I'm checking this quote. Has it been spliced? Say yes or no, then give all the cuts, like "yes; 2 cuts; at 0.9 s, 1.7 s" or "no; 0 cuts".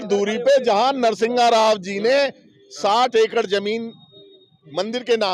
no; 0 cuts